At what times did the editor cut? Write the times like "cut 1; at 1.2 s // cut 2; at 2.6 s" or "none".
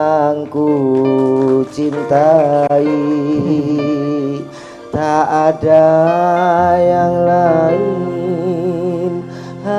none